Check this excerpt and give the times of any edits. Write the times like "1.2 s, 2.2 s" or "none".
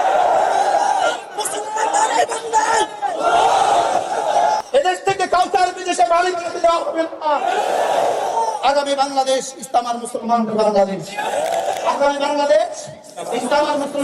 4.6 s